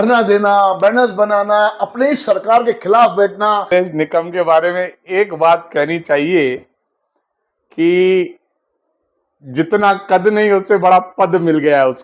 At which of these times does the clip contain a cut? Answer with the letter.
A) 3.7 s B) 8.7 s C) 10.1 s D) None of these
A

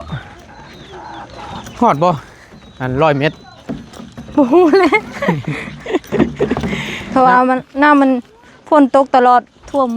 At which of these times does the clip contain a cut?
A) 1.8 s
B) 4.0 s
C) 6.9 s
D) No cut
C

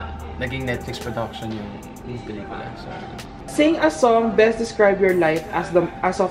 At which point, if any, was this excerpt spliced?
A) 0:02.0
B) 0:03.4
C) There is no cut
B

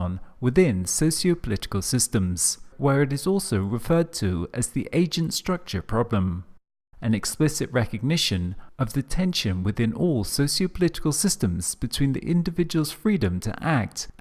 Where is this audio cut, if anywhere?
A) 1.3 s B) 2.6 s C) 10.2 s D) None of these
B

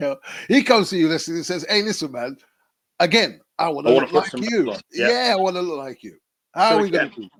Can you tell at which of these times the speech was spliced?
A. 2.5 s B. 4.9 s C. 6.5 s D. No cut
D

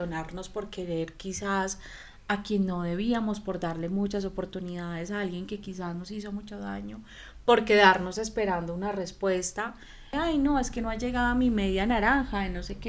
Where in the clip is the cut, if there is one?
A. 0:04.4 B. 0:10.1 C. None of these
B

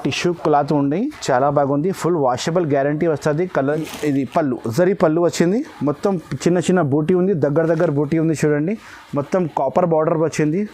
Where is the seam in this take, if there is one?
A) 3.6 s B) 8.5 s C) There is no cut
A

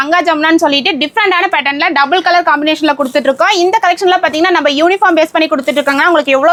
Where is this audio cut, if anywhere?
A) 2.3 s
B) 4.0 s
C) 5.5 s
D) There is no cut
D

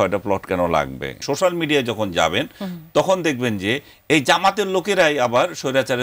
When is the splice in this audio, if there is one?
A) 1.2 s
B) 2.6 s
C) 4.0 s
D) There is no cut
A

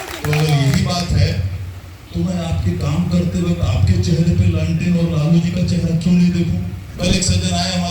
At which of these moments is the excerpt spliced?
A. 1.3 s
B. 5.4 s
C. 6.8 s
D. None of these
C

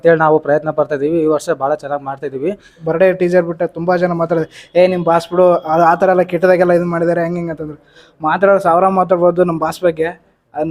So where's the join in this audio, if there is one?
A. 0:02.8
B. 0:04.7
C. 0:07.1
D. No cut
A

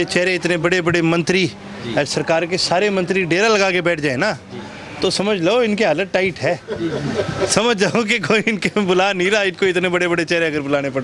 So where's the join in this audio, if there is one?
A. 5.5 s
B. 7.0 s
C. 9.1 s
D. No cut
D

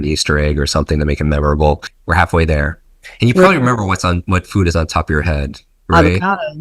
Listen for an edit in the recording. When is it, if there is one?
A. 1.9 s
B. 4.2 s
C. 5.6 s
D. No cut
A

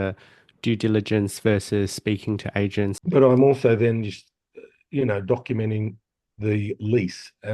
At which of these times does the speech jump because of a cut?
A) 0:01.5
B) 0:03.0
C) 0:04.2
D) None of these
B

